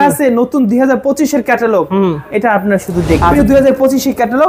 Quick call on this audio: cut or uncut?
cut